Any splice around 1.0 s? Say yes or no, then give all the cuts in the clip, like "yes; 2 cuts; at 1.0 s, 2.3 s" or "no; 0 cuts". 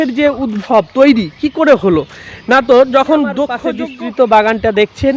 no; 1 cut; at 3.6 s